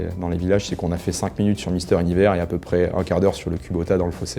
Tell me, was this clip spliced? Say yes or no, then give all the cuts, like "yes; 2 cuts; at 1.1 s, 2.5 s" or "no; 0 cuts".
no; 0 cuts